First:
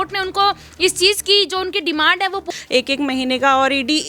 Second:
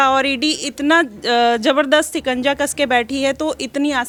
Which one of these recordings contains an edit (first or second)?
first